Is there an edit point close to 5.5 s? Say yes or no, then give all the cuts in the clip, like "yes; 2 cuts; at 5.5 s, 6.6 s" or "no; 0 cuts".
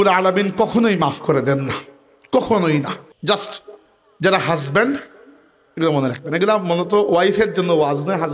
no; 1 cut; at 3.0 s